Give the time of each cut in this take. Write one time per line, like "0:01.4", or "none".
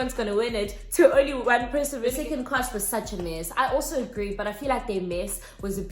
0:02.2